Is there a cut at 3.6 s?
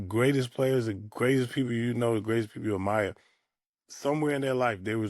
no; 0 cuts

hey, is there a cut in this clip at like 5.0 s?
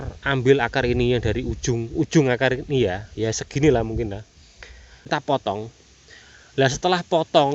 yes; 1 cut; at 5.0 s

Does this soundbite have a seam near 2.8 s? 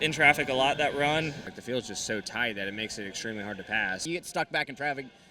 no; 2 cuts; at 1.5 s, 4.0 s

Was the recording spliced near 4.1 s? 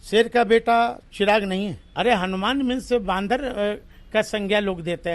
no; 1 cut; at 1.8 s

